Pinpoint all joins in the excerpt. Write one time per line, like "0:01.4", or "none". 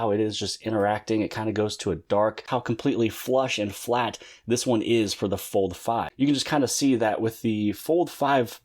0:02.4
0:06.1